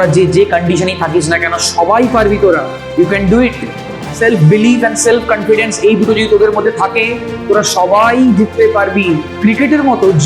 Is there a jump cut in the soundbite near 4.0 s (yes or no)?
no